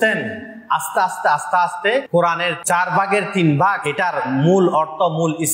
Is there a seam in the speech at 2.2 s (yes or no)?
yes